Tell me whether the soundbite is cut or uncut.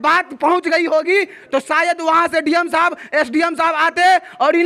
uncut